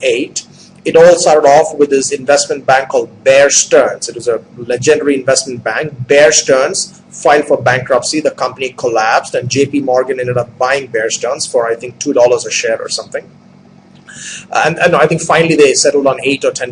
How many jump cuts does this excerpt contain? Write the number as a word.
zero